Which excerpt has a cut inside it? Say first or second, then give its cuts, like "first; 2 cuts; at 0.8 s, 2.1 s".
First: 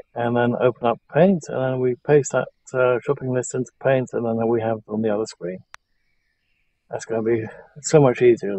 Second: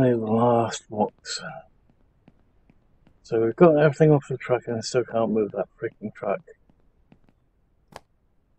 second; 1 cut; at 7.3 s